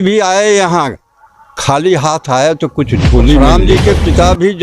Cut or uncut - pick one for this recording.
cut